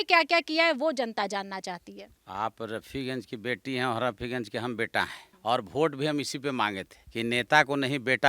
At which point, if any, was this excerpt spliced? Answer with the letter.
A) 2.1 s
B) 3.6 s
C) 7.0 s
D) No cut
D